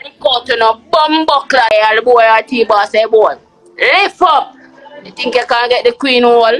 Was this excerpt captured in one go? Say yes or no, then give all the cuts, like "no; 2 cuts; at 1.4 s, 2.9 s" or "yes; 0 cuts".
no; 1 cut; at 1.7 s